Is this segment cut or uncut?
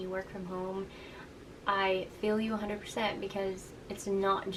uncut